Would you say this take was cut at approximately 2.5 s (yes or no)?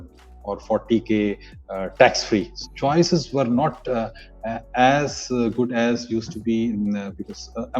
yes